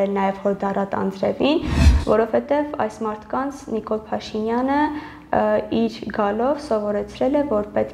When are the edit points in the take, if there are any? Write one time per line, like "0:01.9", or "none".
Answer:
0:01.8